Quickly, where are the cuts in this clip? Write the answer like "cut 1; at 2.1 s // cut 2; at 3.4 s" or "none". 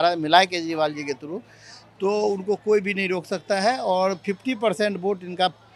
none